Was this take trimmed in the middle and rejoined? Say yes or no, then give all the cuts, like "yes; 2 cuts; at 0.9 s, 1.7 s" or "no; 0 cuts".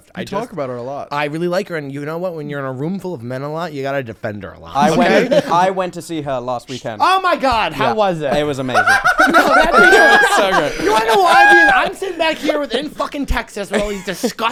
no; 0 cuts